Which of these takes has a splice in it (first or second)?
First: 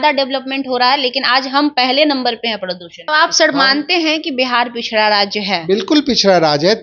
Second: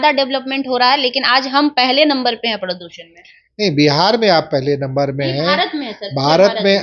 first